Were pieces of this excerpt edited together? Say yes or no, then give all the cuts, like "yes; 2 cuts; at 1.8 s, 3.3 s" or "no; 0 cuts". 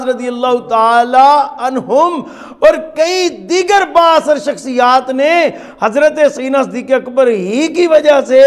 no; 0 cuts